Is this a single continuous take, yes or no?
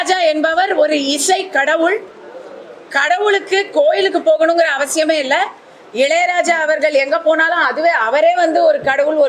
yes